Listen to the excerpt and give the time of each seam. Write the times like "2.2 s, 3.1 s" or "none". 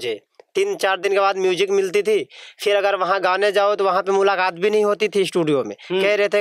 none